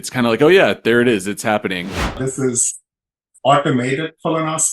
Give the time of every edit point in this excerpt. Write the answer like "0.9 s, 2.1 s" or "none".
2.0 s